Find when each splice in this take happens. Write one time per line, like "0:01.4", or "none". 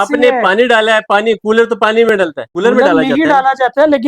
0:02.4